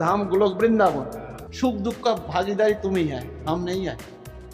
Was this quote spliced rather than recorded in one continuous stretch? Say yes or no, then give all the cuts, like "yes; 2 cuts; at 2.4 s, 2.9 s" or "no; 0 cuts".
yes; 1 cut; at 1.4 s